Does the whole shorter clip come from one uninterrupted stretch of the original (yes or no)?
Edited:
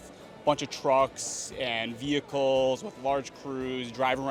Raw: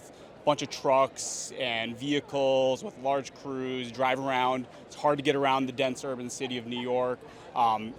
yes